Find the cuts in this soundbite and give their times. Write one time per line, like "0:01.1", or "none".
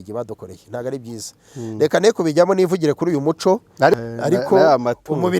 0:04.0